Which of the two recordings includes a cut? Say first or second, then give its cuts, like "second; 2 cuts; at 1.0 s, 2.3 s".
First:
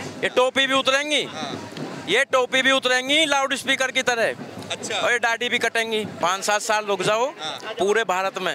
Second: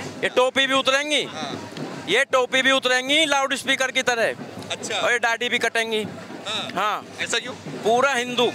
first; 1 cut; at 6.2 s